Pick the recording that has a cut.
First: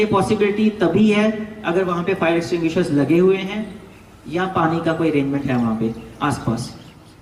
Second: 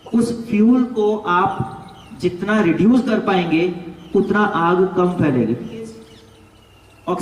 second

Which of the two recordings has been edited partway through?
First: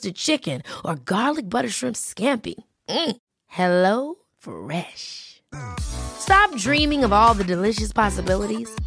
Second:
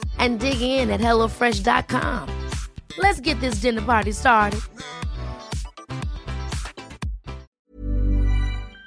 second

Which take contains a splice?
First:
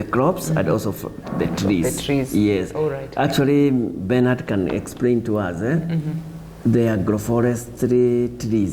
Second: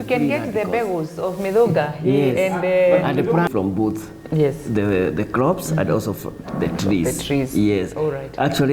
second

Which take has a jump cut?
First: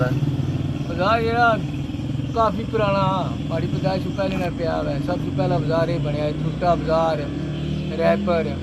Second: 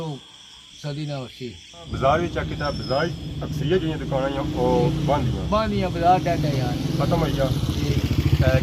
second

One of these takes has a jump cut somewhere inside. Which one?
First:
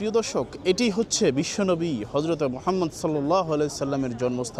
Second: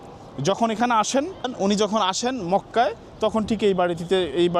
second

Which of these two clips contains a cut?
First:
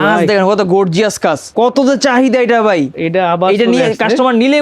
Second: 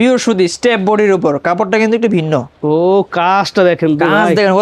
first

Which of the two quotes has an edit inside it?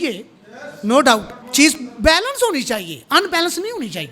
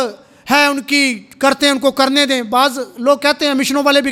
first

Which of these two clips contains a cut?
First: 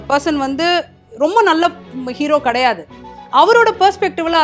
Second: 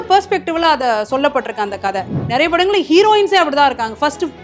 second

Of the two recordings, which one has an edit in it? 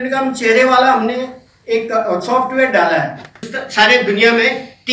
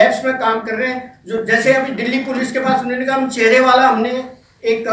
first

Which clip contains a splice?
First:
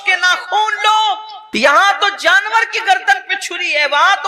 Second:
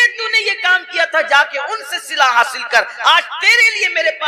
first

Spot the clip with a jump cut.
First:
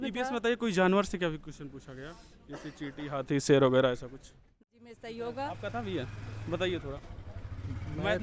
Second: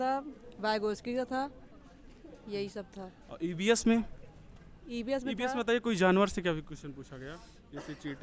first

